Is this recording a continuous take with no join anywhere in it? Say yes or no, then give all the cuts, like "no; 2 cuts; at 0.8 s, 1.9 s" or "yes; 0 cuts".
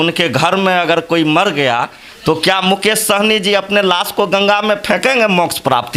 yes; 0 cuts